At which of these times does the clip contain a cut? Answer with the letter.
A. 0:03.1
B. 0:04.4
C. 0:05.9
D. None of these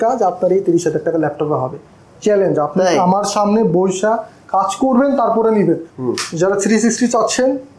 C